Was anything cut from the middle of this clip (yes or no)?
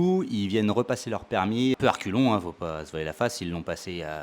yes